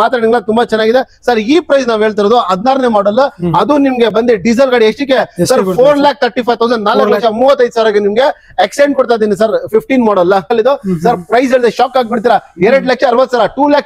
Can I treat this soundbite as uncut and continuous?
no; 1 cut; at 10.5 s

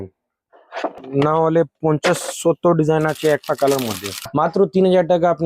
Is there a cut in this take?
yes; 2 cuts; at 1.0 s, 4.3 s

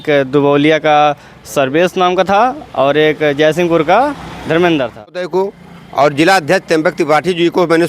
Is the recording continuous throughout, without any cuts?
no; 1 cut; at 5.3 s

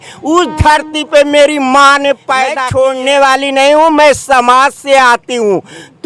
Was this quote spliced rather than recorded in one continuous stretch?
yes; 1 cut; at 2.6 s

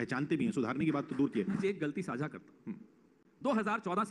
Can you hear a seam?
yes; 1 cut; at 1.6 s

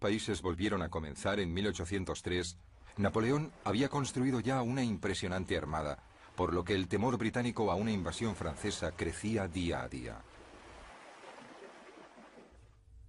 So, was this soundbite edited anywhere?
no; 0 cuts

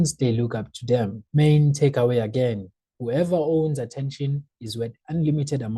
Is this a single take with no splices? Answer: no; 1 cut; at 1.2 s

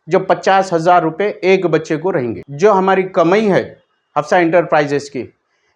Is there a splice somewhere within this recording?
yes; 1 cut; at 2.4 s

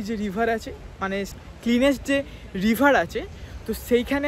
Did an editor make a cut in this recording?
yes; 1 cut; at 1.4 s

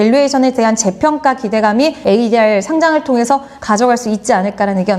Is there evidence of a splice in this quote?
no; 0 cuts

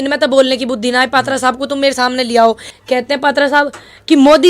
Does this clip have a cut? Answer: yes; 1 cut; at 2.7 s

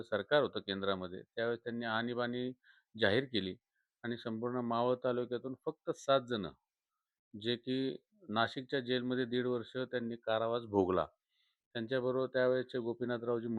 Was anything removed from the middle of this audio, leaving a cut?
no; 0 cuts

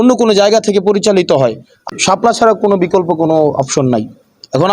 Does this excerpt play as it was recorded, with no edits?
no; 1 cut; at 1.6 s

